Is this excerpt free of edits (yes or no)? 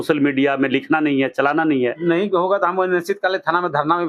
no